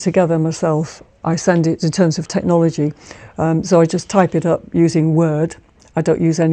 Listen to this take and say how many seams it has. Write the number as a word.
zero